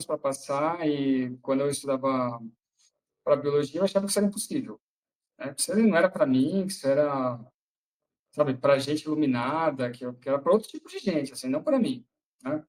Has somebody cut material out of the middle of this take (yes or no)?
no